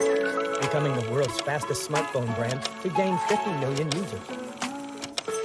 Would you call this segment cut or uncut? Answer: uncut